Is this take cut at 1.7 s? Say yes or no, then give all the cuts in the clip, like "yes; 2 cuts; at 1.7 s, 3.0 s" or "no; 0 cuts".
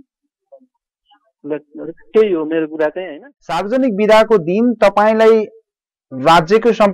no; 1 cut; at 3.2 s